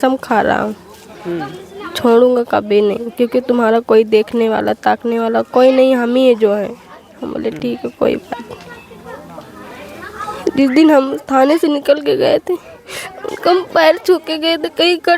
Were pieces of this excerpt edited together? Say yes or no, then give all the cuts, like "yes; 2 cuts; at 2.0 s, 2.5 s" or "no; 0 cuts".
no; 0 cuts